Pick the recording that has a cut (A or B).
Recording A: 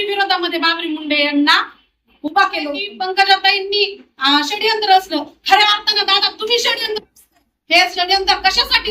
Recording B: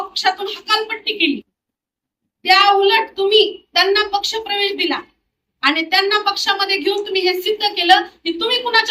A